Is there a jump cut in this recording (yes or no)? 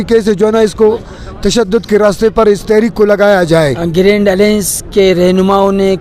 yes